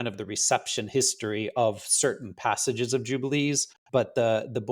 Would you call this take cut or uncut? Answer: cut